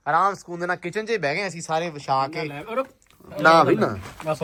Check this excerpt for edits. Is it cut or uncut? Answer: uncut